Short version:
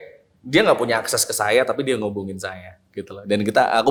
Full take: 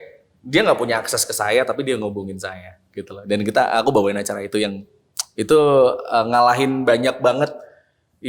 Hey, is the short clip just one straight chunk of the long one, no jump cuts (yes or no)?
yes